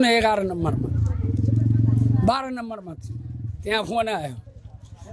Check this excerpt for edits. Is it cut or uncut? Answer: uncut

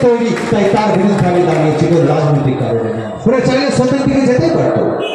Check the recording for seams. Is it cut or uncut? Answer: cut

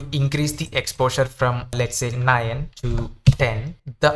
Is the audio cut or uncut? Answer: uncut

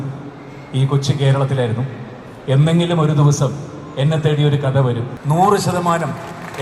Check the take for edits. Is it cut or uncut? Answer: cut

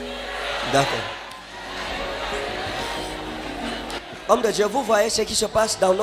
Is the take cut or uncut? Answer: cut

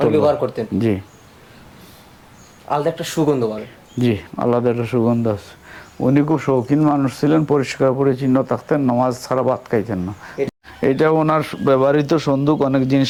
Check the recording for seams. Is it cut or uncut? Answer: uncut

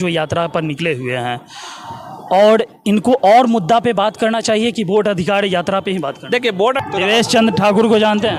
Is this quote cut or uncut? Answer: cut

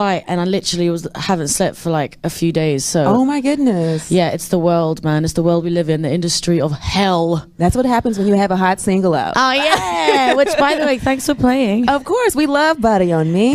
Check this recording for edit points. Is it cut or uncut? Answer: cut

